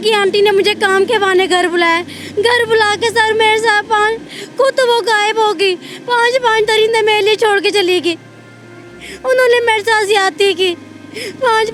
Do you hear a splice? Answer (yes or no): no